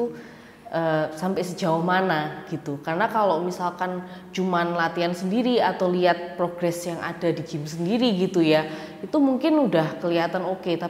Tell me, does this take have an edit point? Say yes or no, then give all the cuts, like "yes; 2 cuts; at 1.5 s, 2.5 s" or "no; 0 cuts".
no; 0 cuts